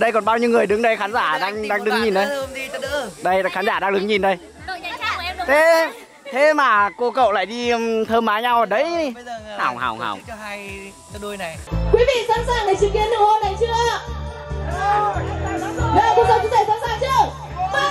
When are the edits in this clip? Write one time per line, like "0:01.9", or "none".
0:11.6